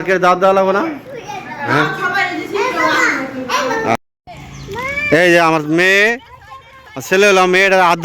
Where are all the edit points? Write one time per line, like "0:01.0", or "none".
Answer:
0:03.9